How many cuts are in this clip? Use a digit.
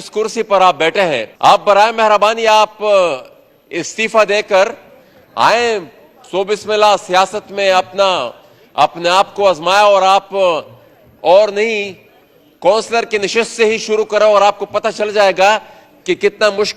1